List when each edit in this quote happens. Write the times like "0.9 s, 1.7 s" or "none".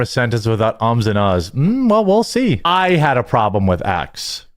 2.7 s